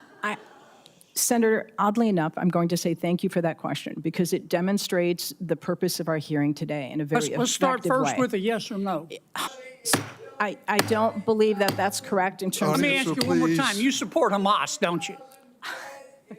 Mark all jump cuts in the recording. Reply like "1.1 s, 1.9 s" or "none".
9.4 s